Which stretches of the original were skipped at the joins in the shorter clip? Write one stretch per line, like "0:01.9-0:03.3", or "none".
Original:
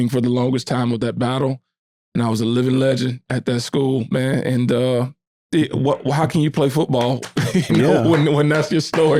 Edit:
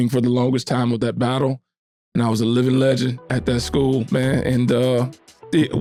none